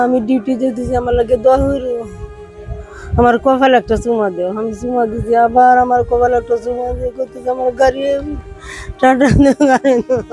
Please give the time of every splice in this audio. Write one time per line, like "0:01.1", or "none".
none

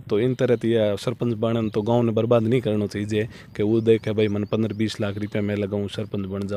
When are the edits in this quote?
none

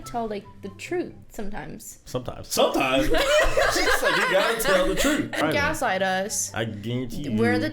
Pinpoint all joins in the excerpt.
0:05.4

